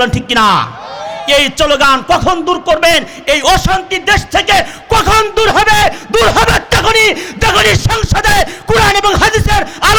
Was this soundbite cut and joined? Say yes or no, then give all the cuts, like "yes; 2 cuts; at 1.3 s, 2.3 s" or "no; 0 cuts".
no; 0 cuts